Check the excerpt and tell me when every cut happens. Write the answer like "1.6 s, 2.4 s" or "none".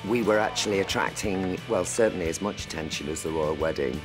1.7 s